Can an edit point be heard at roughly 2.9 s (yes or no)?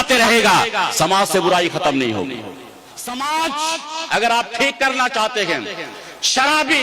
yes